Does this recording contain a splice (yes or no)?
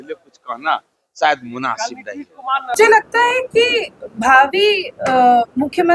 yes